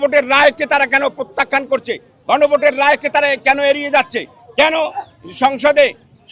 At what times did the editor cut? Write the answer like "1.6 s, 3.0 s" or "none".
none